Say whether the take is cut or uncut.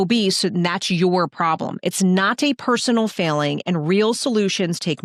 uncut